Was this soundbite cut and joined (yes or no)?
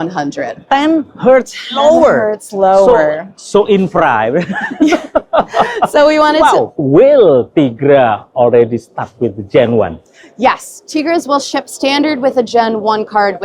yes